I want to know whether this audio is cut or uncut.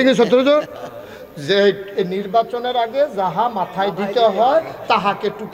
uncut